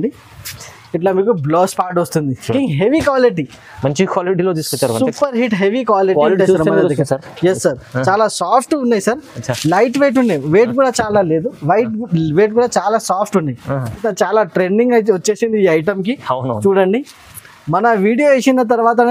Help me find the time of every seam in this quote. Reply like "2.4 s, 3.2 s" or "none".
2.5 s, 14.0 s